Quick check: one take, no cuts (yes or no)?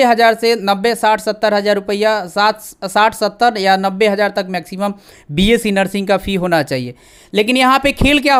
yes